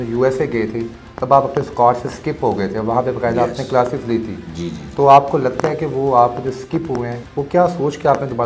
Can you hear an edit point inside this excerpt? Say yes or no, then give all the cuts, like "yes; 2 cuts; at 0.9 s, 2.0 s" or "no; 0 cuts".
yes; 1 cut; at 7.2 s